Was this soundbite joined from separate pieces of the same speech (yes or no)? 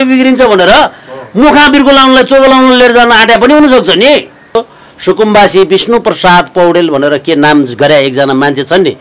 yes